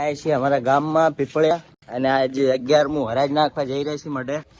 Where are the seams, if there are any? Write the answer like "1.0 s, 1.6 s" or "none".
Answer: 1.5 s